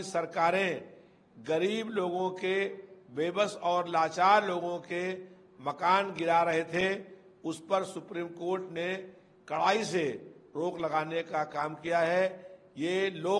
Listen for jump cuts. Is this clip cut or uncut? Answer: uncut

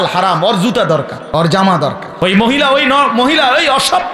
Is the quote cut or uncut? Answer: cut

